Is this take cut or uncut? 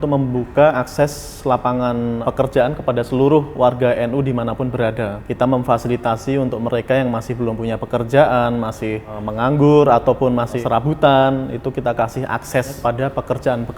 cut